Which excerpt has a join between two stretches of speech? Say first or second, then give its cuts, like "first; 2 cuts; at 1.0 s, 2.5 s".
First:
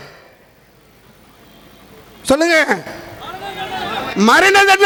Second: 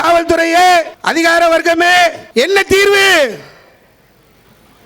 second; 2 cuts; at 1.0 s, 2.2 s